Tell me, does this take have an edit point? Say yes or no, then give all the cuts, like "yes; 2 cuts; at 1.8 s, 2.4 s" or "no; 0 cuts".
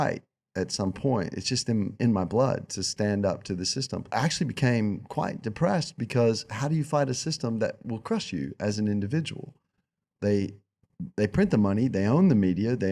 yes; 1 cut; at 4.1 s